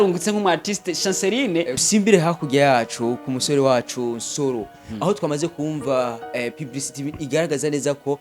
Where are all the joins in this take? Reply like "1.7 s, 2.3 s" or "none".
1.8 s